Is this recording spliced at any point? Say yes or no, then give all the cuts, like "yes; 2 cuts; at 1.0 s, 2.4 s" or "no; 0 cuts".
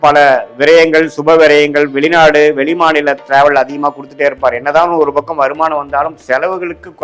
no; 0 cuts